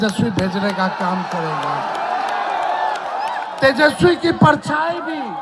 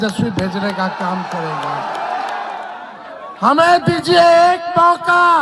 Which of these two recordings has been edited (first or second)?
second